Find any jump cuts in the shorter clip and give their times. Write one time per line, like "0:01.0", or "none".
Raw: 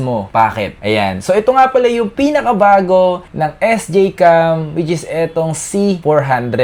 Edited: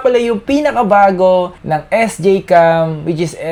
none